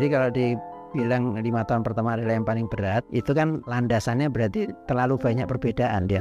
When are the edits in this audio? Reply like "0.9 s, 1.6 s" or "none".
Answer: 1.2 s